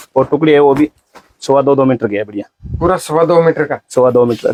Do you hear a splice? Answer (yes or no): no